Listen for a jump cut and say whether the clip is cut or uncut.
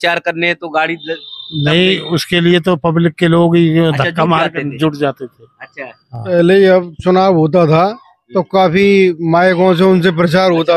cut